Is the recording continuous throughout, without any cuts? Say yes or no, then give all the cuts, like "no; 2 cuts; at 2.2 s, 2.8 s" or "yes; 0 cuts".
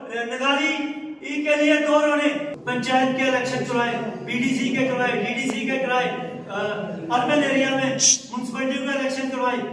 no; 1 cut; at 2.5 s